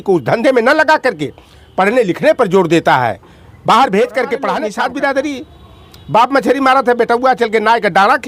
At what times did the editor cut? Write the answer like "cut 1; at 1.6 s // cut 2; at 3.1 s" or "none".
cut 1; at 4.6 s